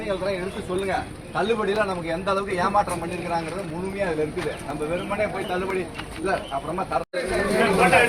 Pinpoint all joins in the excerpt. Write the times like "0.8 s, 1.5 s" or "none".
none

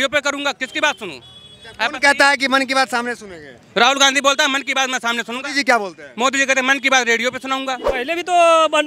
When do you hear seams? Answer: 7.9 s

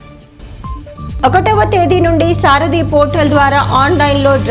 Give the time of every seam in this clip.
0.9 s

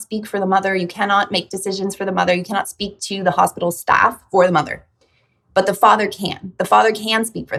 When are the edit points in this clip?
none

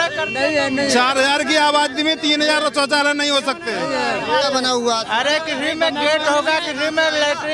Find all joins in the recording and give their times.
none

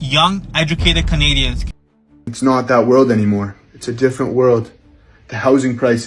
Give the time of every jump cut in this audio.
1.6 s

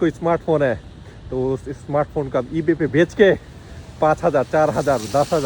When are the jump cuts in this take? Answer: none

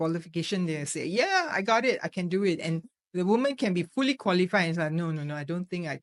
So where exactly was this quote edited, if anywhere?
none

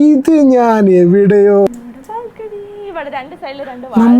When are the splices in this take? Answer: 1.7 s

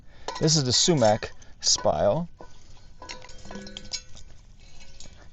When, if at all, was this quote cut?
none

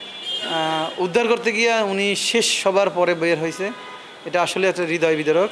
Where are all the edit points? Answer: none

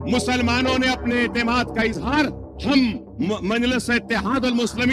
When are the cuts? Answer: none

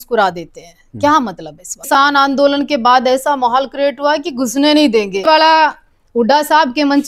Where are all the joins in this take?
1.9 s, 5.2 s

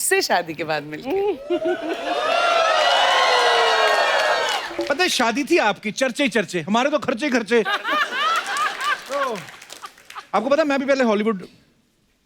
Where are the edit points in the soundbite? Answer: none

